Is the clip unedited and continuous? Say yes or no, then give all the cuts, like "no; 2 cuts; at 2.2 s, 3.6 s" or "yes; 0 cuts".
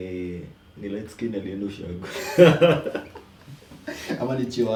yes; 0 cuts